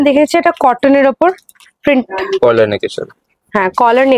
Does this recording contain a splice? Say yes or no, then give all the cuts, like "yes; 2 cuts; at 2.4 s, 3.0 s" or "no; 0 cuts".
no; 0 cuts